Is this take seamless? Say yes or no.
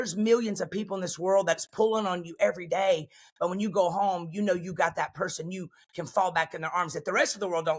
yes